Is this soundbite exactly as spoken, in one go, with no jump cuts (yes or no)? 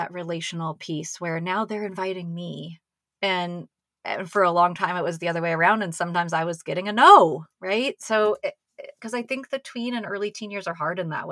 yes